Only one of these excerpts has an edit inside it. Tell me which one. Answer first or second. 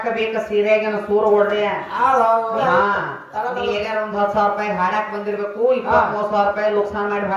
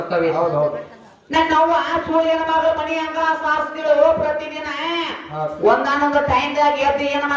first